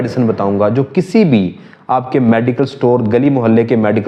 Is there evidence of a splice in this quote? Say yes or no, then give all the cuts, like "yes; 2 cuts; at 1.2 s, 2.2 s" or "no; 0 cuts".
no; 0 cuts